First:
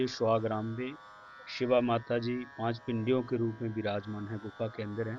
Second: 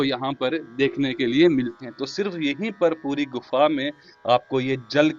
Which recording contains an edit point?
second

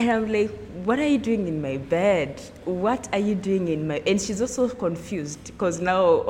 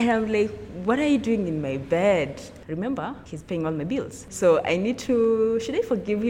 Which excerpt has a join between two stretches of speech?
second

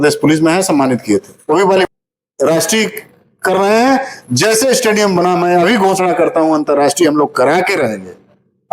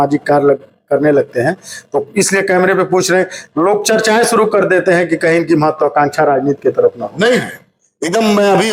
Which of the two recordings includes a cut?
first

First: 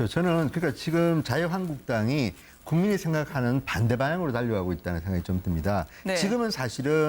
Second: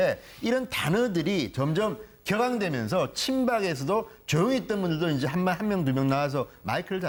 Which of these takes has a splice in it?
first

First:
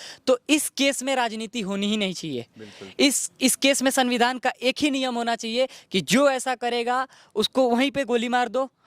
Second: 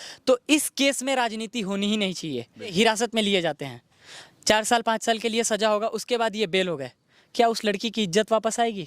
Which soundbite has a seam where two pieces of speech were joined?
second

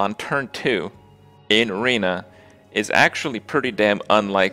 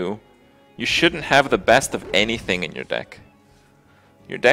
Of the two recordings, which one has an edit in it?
first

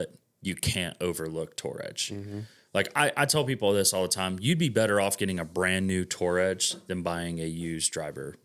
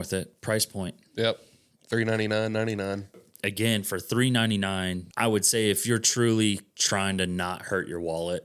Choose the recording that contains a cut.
second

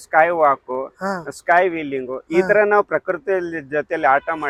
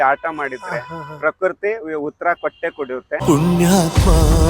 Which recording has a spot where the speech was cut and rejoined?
second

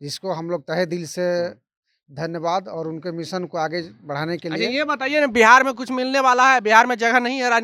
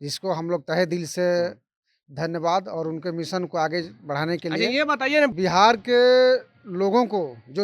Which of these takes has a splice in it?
second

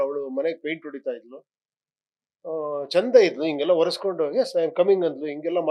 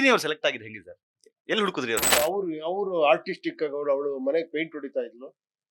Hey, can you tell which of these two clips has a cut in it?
second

